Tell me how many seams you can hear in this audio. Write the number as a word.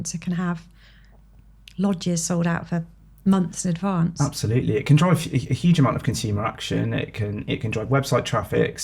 zero